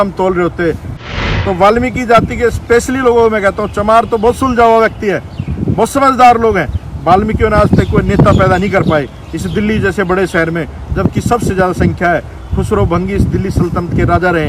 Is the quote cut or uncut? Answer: cut